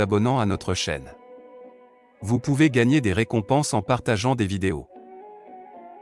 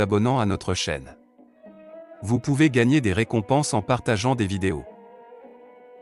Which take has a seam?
second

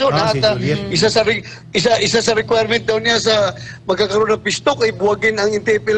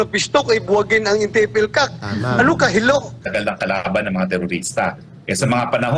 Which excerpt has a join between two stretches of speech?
second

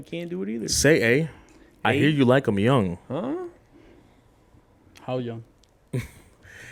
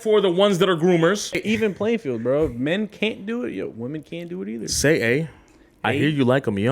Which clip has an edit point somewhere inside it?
second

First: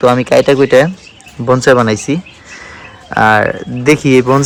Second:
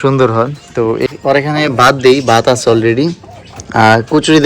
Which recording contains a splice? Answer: second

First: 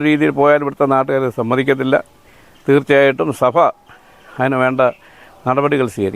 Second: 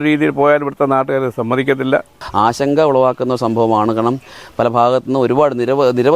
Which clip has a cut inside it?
second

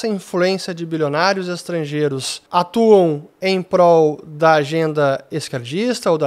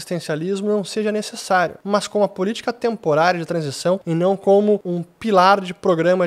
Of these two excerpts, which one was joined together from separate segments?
second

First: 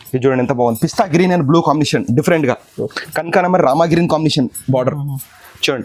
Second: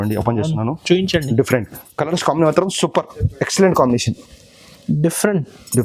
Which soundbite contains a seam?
second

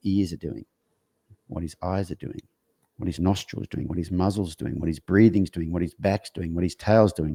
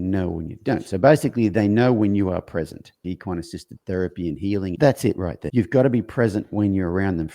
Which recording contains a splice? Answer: second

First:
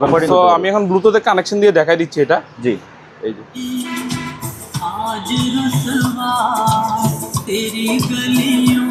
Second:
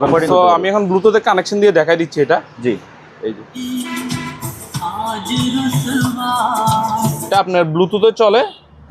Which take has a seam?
second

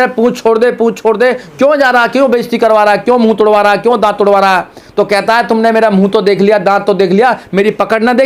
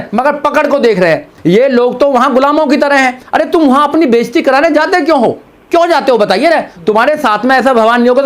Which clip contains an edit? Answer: second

